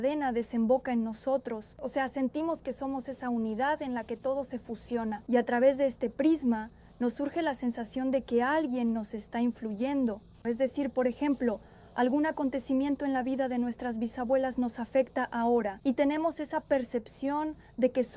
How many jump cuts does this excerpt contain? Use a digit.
3